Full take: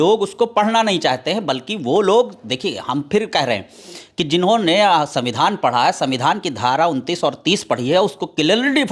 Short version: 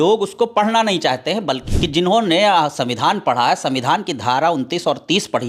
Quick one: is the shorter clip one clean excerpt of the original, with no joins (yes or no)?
no